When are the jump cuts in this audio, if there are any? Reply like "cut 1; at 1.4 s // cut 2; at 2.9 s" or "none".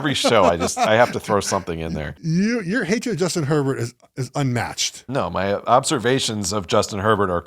cut 1; at 2.2 s